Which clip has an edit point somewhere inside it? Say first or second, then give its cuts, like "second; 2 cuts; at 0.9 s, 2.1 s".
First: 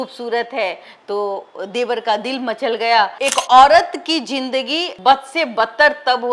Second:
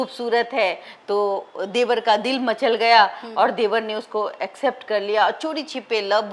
first; 1 cut; at 3.1 s